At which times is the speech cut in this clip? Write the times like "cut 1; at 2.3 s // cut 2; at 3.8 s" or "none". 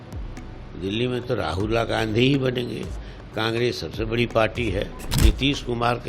cut 1; at 5.0 s